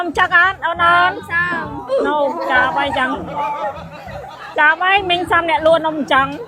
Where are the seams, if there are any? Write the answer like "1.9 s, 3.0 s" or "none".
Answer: none